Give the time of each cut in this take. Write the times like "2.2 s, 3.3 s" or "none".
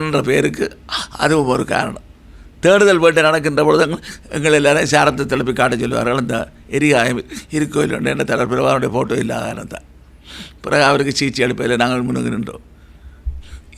none